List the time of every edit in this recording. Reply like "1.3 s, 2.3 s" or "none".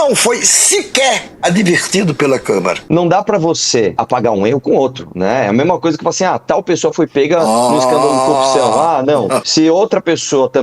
2.8 s, 4.0 s, 9.5 s